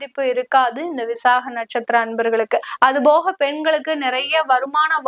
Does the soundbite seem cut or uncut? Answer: cut